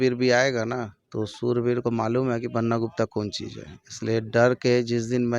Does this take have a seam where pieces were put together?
yes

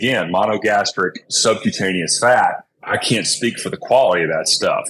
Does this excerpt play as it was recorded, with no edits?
no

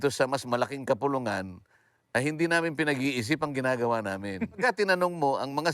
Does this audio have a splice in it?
yes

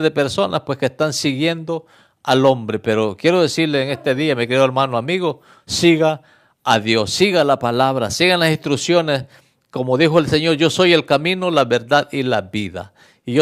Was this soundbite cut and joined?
no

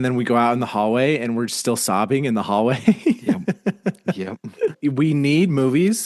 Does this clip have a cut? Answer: yes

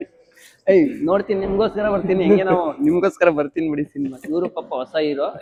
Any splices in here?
no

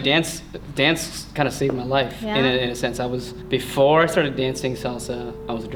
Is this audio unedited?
yes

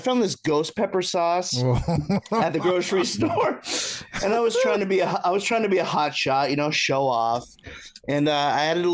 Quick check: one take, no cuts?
yes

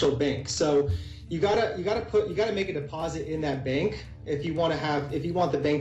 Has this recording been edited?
no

